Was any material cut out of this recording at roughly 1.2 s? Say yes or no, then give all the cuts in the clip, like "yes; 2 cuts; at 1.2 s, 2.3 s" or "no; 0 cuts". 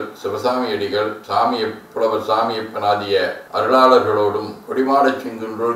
no; 0 cuts